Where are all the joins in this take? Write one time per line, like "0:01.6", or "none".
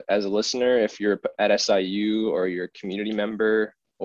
none